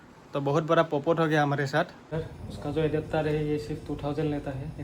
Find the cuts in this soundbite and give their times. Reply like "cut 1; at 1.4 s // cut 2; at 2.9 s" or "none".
cut 1; at 2.1 s